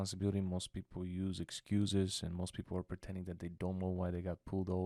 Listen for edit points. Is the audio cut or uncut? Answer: uncut